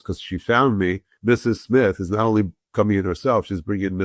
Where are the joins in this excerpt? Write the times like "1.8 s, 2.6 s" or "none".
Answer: 1.1 s